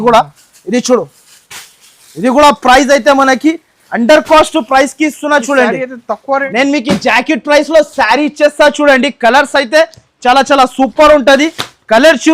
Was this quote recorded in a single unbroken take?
no; 1 cut; at 6.5 s

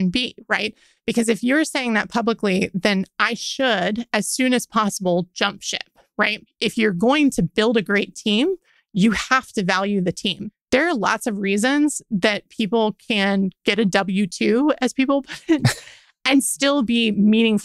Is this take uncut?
no; 2 cuts; at 6.4 s, 10.5 s

